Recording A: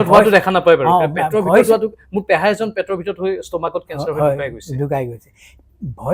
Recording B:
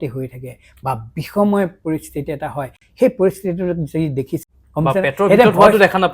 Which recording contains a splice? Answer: B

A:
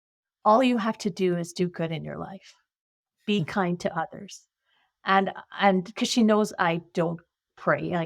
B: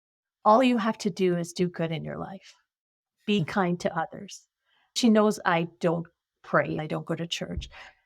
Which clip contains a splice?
B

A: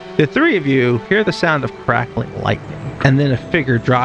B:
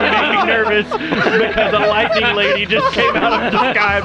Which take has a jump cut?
A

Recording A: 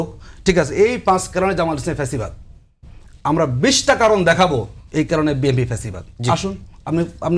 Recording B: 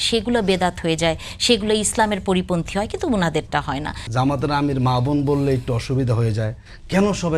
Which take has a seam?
B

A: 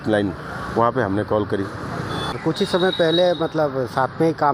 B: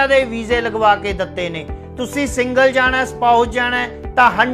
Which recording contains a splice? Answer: A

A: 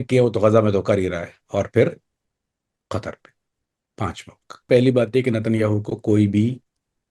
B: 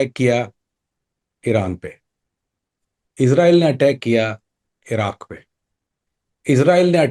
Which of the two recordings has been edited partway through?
A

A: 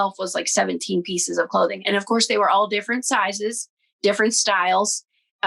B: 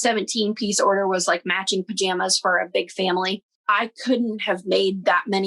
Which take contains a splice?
B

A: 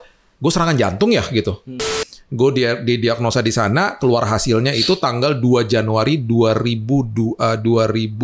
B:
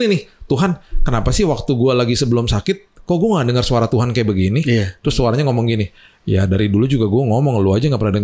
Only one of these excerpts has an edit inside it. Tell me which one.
A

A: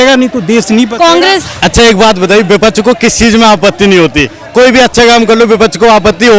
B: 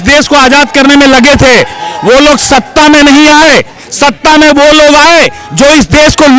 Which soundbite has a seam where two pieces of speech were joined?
A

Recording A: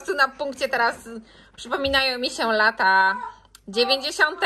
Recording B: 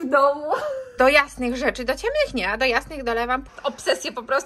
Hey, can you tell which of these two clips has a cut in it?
B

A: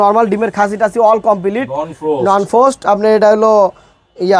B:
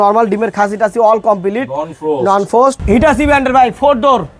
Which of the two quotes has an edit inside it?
B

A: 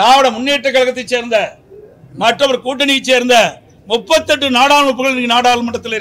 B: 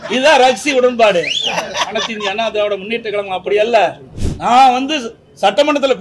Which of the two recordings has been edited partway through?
B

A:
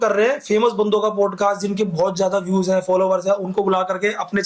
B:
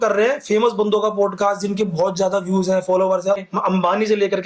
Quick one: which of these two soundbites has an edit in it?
B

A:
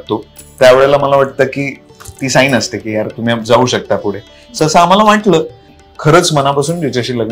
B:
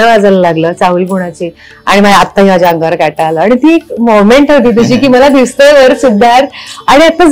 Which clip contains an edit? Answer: A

